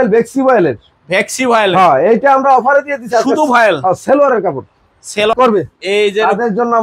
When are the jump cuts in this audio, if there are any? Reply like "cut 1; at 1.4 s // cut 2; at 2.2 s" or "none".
cut 1; at 5.3 s